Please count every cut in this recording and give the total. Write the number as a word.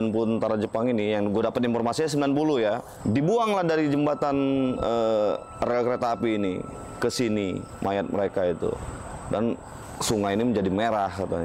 one